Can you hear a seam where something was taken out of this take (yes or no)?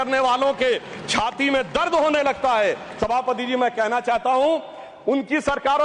no